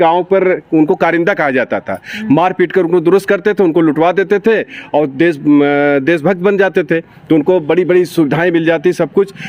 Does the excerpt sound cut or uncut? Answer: uncut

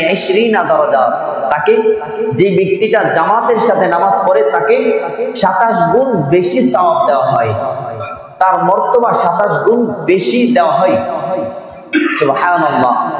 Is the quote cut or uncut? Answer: uncut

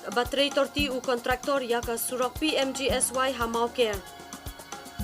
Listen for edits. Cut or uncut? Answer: cut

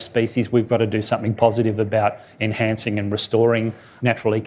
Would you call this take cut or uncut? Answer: uncut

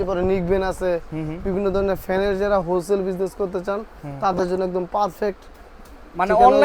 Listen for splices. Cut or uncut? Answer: uncut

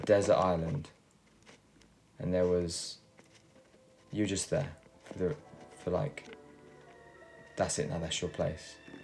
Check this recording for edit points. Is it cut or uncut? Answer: uncut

